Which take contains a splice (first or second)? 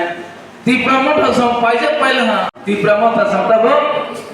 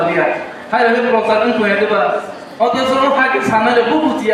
first